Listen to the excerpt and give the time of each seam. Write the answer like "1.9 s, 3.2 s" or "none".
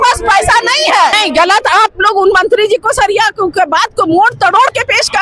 1.2 s